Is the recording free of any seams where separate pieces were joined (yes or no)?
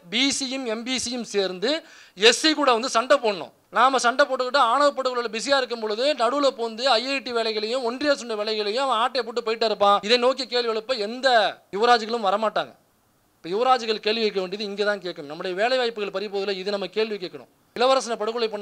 no